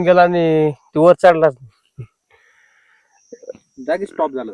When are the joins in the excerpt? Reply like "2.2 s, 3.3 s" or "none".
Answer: none